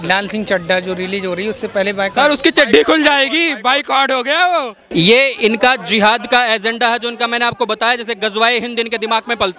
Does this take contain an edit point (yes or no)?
yes